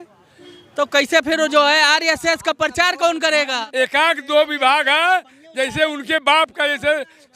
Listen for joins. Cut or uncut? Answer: cut